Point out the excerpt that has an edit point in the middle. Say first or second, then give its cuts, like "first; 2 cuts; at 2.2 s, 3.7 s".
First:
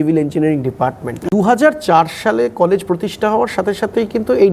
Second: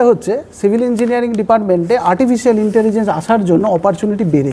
first; 1 cut; at 1.2 s